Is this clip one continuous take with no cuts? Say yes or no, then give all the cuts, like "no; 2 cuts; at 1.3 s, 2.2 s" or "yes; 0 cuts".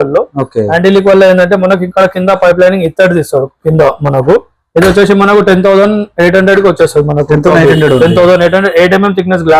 no; 1 cut; at 3.5 s